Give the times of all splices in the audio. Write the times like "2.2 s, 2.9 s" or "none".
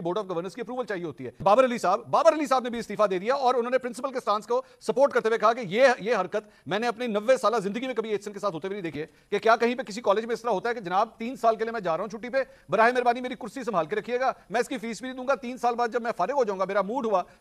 1.4 s, 9.0 s

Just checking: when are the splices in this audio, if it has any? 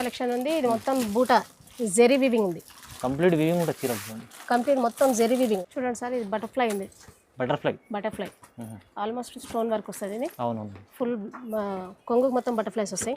5.6 s

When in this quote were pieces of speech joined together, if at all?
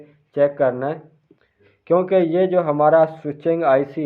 1.4 s

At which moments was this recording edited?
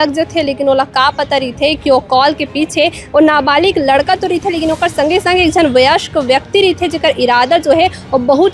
none

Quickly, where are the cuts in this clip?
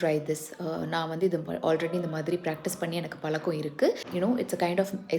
4.1 s

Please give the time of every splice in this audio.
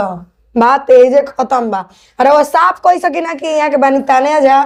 none

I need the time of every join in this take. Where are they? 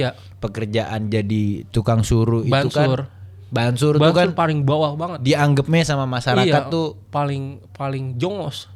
none

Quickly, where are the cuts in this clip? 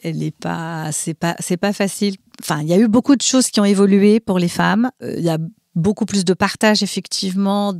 2.3 s, 5.0 s

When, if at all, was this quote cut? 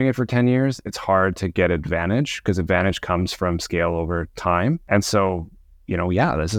4.8 s

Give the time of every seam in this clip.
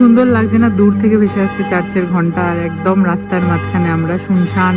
none

